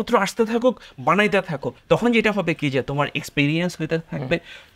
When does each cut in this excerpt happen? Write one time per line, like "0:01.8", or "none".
0:01.7

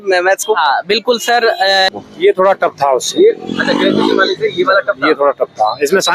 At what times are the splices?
0:01.9

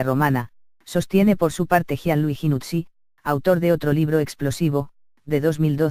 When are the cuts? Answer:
none

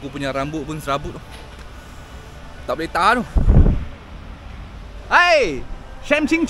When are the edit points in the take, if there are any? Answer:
none

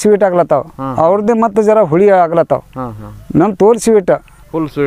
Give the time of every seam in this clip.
none

